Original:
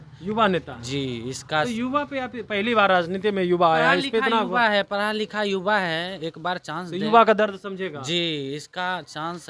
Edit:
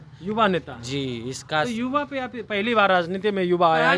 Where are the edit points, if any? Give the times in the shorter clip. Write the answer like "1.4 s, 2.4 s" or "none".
none